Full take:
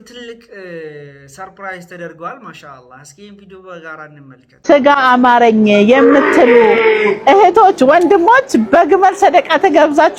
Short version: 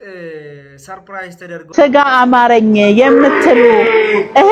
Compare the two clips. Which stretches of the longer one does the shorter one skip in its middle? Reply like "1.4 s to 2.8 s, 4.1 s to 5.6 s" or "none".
2.2 s to 4.6 s